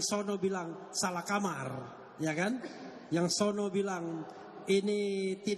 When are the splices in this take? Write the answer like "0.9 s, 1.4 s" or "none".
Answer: none